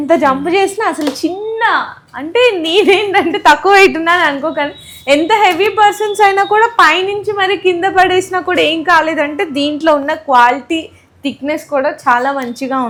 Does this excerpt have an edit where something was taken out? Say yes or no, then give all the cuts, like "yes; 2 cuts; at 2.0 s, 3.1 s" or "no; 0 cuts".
no; 0 cuts